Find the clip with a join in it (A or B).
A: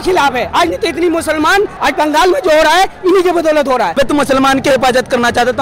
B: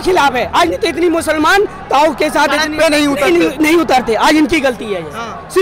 A